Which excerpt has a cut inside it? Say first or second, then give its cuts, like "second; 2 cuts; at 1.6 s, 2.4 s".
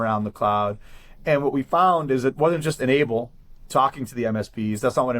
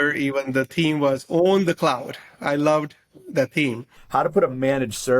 second; 1 cut; at 3.9 s